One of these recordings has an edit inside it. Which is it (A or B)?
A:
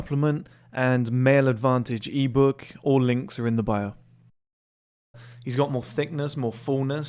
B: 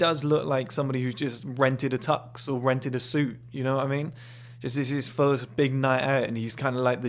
A